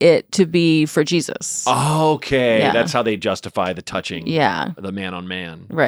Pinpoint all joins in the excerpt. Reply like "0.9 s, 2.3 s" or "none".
none